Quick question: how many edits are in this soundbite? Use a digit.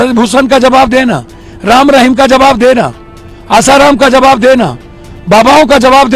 0